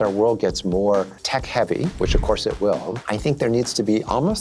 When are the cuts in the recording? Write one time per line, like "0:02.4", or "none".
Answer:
0:01.2
0:03.0